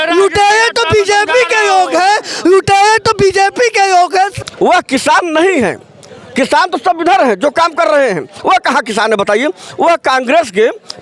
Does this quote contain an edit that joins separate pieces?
yes; 1 cut; at 4.4 s

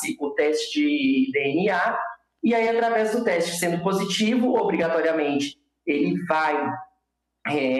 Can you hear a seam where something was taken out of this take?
no; 0 cuts

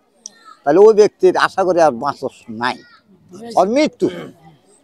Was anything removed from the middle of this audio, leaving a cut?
no; 0 cuts

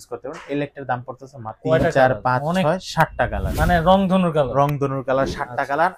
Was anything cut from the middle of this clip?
yes; 1 cut; at 1.6 s

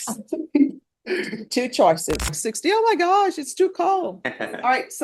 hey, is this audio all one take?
no; 1 cut; at 2.5 s

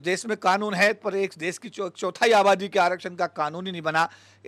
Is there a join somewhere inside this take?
no; 0 cuts

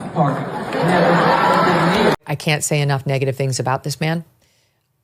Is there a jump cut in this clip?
yes; 1 cut; at 2.2 s

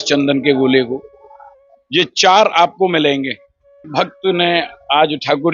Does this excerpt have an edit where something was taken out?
yes; 1 cut; at 3.9 s

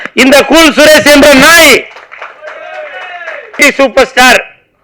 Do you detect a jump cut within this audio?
yes; 1 cut; at 3.6 s

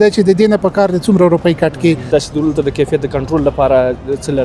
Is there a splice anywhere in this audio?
yes; 1 cut; at 2.0 s

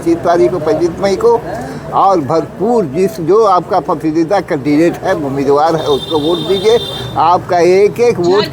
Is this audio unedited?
yes; 0 cuts

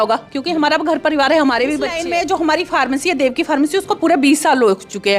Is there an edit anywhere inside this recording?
yes; 1 cut; at 2.0 s

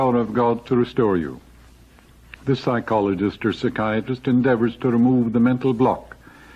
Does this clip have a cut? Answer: no; 0 cuts

